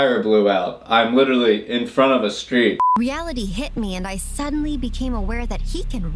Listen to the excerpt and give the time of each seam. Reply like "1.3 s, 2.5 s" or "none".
2.8 s